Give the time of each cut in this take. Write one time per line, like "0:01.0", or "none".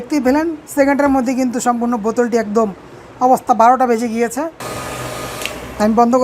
0:04.6